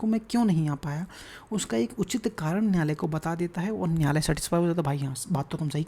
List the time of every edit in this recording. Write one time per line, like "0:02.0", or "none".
none